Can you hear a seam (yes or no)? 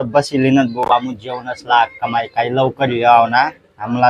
no